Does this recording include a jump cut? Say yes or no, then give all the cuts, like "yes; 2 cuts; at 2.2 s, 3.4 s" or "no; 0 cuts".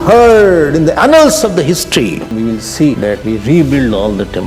yes; 2 cuts; at 2.3 s, 3.1 s